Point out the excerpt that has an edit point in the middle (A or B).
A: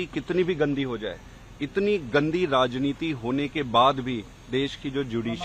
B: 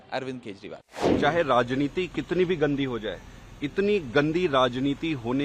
B